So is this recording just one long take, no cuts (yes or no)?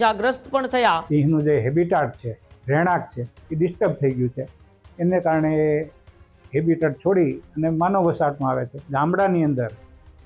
no